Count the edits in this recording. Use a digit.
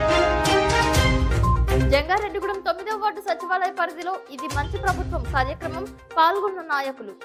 0